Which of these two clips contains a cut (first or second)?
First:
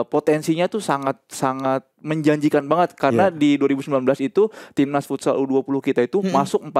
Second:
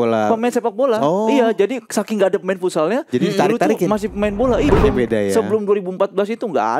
second